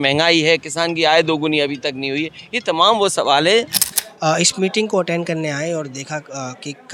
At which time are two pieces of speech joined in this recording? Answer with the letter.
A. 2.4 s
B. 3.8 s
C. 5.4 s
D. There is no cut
B